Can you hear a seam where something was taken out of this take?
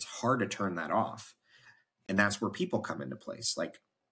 no; 0 cuts

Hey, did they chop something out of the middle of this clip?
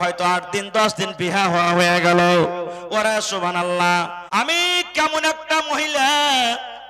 yes; 1 cut; at 4.2 s

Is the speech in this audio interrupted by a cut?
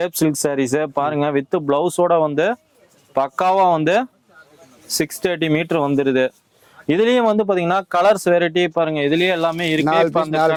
no; 0 cuts

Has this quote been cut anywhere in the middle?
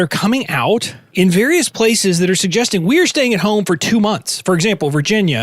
yes; 1 cut; at 1.0 s

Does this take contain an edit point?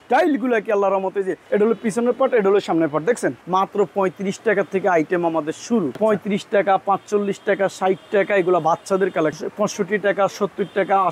yes; 4 cuts; at 1.4 s, 3.4 s, 6.0 s, 9.4 s

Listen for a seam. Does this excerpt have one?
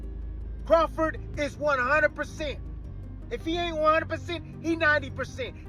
no; 0 cuts

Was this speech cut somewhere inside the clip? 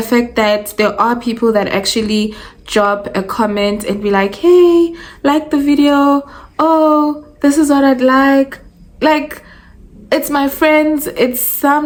no; 0 cuts

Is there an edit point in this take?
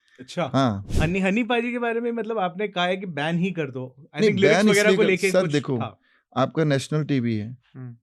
yes; 1 cut; at 1.2 s

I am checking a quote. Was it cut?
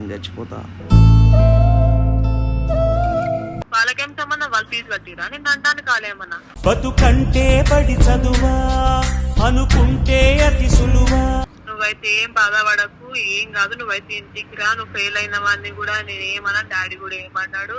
yes; 2 cuts; at 3.5 s, 11.6 s

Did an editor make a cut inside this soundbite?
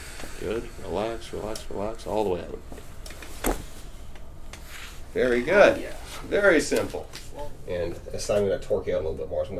no; 0 cuts

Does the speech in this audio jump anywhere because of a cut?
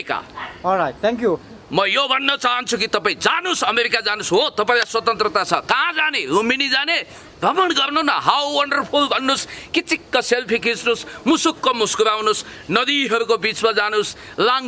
yes; 1 cut; at 1.4 s

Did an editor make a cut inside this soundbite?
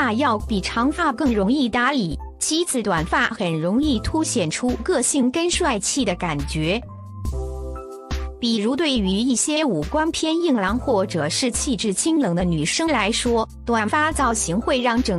no; 0 cuts

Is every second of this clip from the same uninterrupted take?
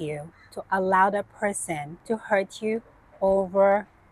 no; 1 cut; at 1.9 s

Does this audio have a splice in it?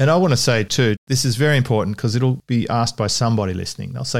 yes; 2 cuts; at 1.0 s, 2.4 s

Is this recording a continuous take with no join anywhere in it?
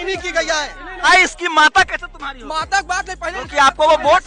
no; 1 cut; at 1.0 s

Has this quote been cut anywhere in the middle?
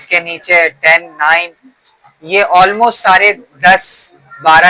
no; 0 cuts

